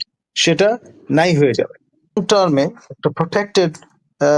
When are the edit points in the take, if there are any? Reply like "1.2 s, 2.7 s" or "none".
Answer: 2.2 s